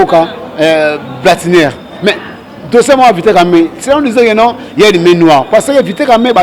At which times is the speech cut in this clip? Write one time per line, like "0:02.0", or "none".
none